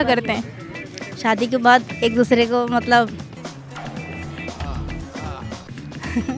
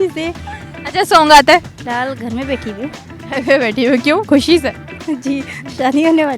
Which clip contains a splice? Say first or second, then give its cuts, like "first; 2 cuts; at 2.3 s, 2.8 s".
second; 1 cut; at 1.8 s